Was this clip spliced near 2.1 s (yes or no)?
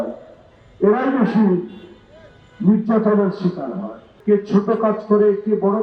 no